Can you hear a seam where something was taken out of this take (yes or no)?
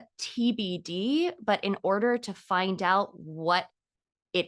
no